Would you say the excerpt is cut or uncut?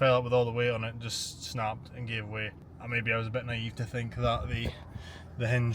uncut